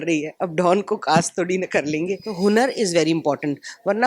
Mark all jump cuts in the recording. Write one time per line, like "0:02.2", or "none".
0:02.3